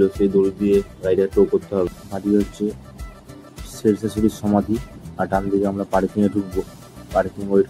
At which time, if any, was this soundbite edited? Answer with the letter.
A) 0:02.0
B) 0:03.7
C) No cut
A